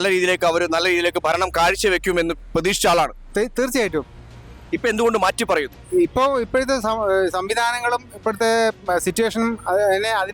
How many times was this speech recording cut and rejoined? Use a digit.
0